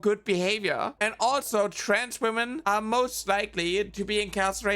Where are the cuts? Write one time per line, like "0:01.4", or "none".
0:00.9